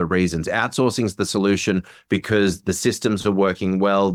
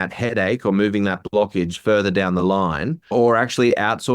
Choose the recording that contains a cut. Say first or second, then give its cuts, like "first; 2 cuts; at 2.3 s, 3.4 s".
second; 1 cut; at 3.1 s